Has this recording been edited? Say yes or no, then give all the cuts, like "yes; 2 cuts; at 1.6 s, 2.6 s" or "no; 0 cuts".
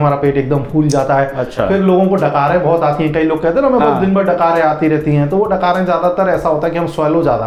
no; 0 cuts